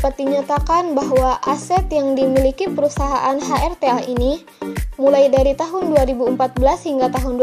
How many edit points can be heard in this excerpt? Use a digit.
0